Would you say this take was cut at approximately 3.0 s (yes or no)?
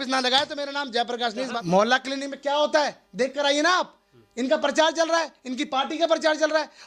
no